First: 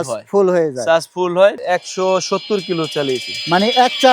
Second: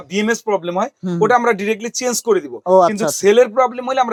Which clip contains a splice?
first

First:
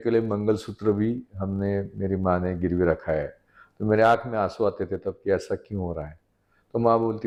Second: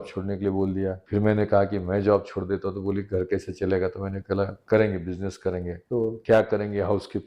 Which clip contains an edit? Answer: second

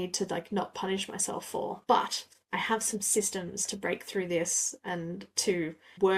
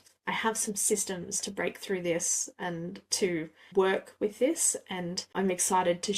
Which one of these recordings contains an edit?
second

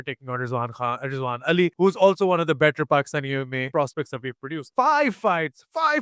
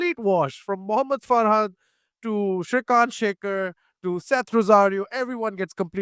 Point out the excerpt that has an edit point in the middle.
first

